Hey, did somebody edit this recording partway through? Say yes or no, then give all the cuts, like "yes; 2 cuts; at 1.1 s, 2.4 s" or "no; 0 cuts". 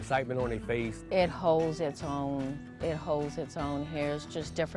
yes; 1 cut; at 1.0 s